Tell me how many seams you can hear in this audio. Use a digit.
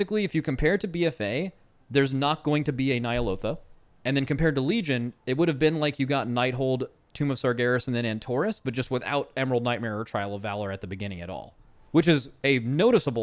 0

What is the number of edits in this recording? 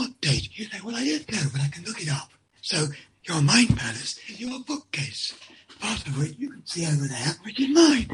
0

